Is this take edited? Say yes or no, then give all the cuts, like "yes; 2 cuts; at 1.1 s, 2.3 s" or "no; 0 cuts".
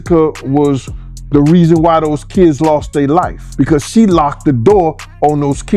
yes; 1 cut; at 3.4 s